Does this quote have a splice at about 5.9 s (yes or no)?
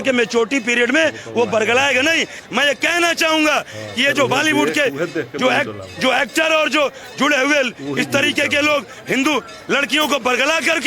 no